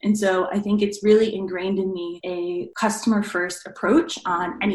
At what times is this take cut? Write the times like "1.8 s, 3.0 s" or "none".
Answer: none